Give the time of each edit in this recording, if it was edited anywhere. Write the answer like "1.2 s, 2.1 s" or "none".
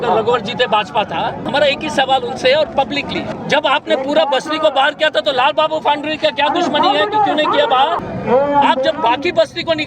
1.5 s, 3.3 s, 8.1 s